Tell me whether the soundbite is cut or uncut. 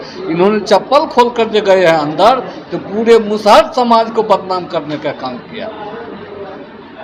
uncut